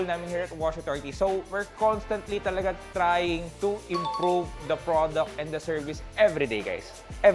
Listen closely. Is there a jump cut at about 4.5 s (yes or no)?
no